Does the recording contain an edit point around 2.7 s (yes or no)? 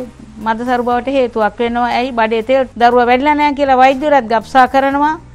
yes